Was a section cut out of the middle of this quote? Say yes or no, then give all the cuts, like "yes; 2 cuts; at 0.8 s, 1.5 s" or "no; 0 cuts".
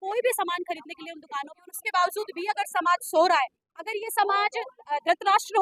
yes; 1 cut; at 1.5 s